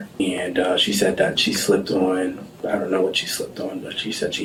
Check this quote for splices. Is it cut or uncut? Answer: uncut